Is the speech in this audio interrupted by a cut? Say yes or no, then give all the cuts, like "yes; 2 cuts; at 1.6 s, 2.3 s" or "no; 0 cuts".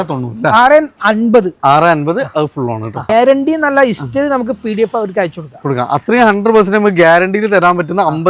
yes; 1 cut; at 3.1 s